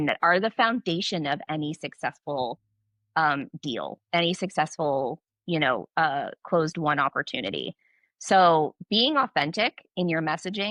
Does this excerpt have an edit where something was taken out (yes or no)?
no